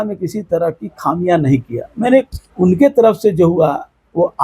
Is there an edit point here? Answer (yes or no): yes